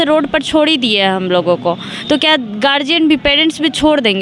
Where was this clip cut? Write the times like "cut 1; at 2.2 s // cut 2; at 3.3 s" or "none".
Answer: none